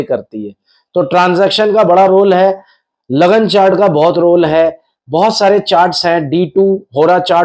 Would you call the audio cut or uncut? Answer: uncut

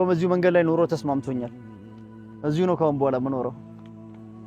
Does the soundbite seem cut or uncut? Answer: cut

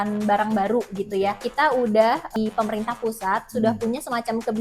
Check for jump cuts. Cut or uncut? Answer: cut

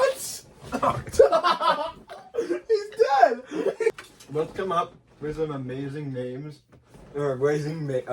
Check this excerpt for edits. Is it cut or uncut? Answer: cut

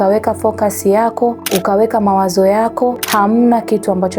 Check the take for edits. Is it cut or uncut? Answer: cut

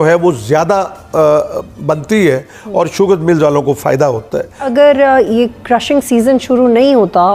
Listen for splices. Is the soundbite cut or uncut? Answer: cut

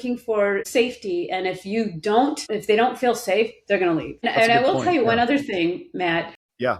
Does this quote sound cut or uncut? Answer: uncut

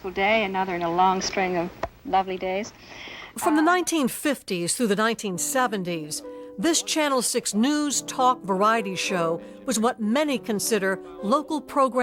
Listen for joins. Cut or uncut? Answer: uncut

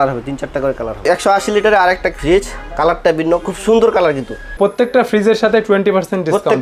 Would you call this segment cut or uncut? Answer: cut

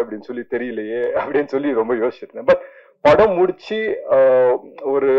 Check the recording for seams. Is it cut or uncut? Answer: uncut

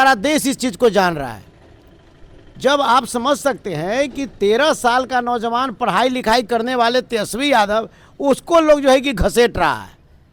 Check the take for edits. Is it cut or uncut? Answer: uncut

